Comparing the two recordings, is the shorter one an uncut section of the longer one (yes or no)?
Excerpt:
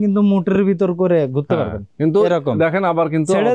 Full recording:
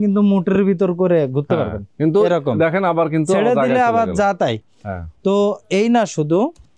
yes